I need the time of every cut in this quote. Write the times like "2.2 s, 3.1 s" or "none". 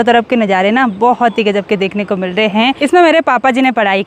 2.8 s